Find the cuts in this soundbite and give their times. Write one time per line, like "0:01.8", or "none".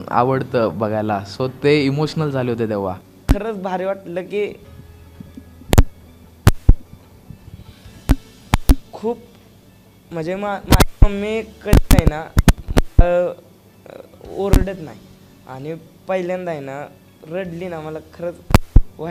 0:03.1